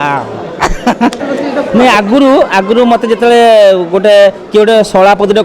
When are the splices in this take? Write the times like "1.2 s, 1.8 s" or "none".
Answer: 1.2 s